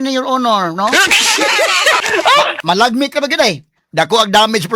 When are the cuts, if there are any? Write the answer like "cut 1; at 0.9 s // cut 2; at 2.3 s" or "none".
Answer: cut 1; at 2.0 s